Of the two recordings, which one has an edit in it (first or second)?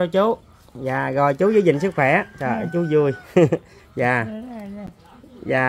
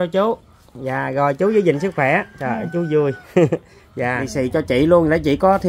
second